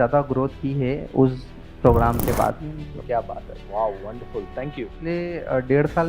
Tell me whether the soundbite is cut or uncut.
cut